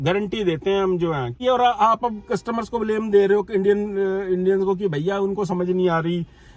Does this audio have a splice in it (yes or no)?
yes